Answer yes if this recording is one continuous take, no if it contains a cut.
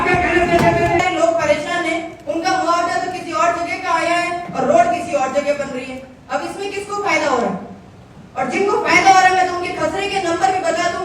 no